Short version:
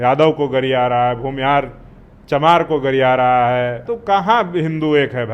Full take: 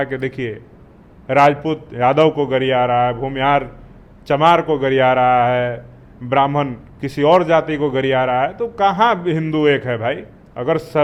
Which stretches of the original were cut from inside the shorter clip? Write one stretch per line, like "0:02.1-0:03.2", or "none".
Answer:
0:05.9-0:08.6

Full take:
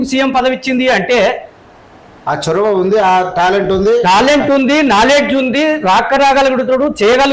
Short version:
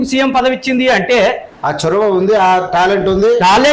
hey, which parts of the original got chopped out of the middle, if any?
0:01.5-0:02.1

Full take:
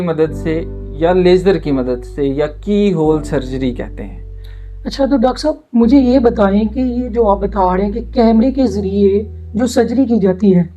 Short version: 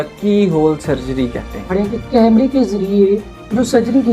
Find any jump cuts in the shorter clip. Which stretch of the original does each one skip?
0:04.2-0:07.7

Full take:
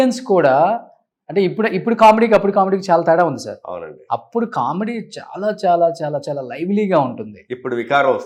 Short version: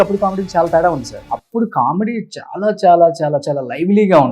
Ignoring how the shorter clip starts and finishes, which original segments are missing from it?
0:03.5-0:04.0

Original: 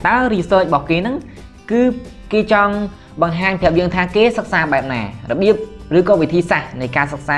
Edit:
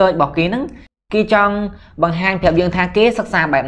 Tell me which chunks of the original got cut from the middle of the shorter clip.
0:01.5-0:02.1

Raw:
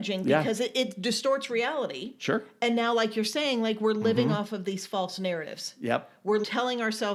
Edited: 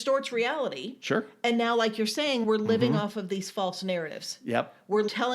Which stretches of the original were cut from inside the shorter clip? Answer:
0:03.6-0:03.8

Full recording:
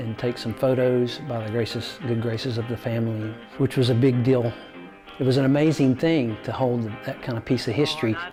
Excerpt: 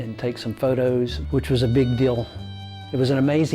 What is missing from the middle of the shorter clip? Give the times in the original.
0:01.2-0:03.5

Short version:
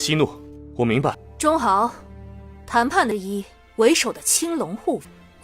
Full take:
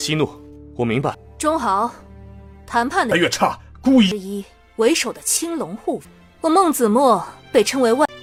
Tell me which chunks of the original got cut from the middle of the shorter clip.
0:03.1-0:04.1

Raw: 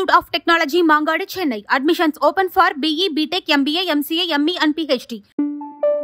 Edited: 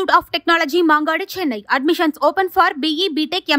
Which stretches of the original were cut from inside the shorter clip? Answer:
none

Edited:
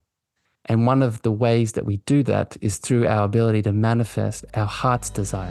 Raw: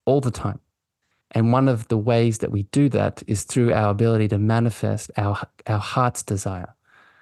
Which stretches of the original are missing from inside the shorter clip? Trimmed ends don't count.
0:05.1-0:05.5

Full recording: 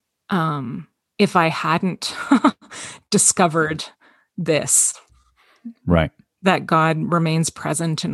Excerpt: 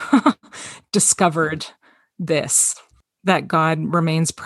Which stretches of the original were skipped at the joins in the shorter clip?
0:05.2-0:06.2

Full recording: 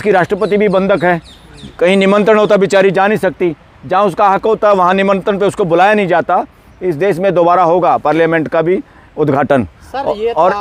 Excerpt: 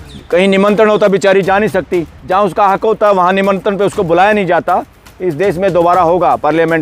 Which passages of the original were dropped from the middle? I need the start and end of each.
0:03.6-0:03.8

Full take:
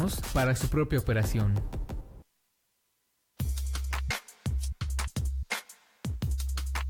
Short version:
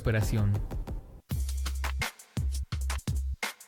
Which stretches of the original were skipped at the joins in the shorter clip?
0:02.1-0:03.2

